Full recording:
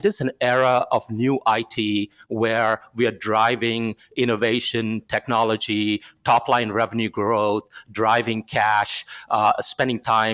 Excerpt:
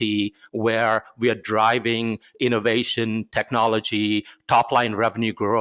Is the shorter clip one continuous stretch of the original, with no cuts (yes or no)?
yes